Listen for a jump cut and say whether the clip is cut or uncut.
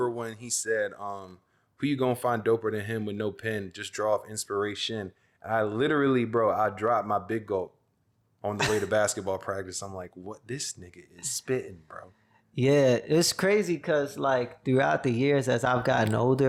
uncut